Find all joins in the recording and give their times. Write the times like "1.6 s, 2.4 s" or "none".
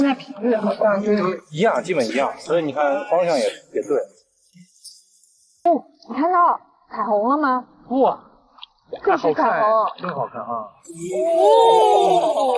5.7 s